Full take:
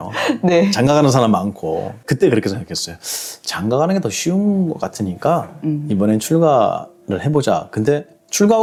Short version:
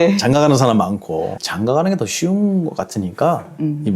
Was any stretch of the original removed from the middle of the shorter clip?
yes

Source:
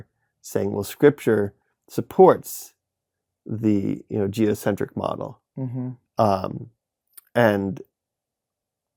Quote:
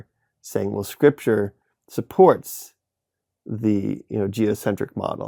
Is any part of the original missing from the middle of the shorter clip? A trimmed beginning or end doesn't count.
no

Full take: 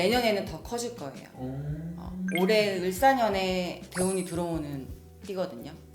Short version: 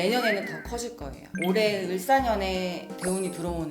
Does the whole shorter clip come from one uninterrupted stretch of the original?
no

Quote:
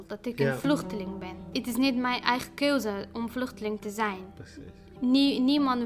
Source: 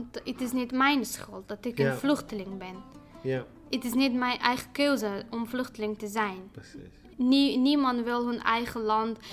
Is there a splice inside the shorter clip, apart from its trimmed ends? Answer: yes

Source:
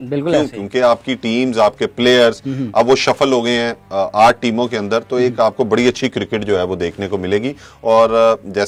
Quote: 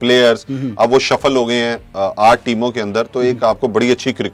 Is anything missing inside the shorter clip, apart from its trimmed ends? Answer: no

